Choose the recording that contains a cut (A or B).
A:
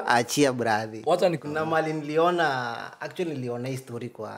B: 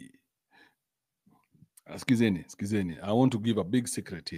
A